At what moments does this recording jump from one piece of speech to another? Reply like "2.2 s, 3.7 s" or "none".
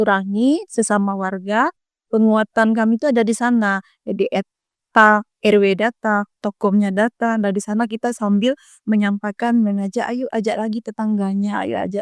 none